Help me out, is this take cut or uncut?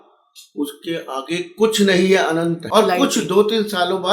cut